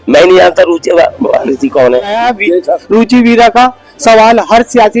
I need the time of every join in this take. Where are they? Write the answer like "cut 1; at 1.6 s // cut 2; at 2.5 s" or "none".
cut 1; at 2.2 s